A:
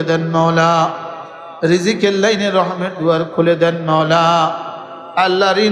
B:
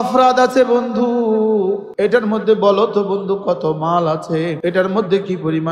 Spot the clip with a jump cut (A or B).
B